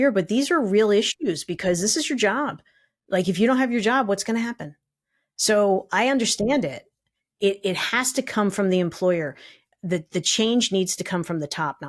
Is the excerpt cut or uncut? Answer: uncut